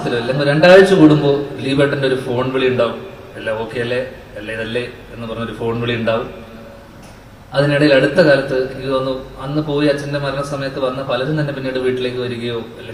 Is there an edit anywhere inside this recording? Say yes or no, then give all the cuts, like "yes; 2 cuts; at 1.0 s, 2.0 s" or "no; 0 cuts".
no; 0 cuts